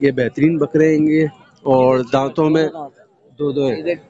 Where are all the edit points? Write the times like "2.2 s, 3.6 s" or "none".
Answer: none